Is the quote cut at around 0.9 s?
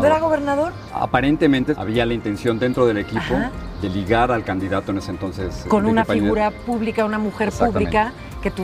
yes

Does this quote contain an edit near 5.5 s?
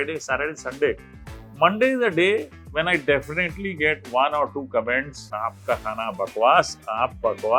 yes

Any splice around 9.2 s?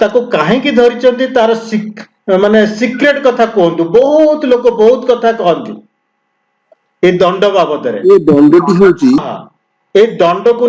yes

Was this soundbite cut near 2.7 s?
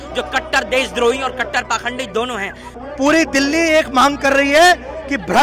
yes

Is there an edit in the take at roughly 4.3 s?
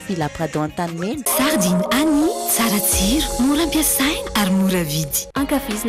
no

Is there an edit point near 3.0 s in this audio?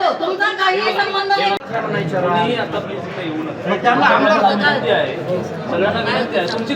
no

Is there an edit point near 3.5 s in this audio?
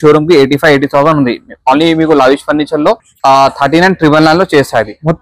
no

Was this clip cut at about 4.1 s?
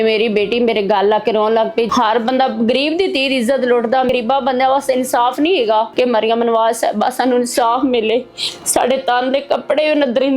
yes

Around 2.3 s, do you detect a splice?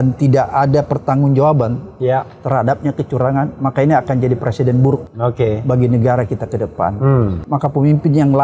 no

